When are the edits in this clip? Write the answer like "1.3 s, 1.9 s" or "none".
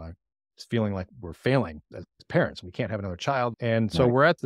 3.6 s